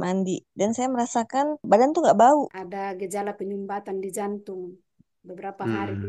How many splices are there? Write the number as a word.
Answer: two